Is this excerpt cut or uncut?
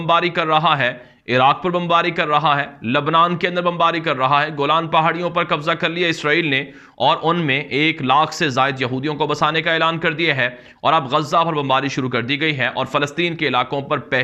uncut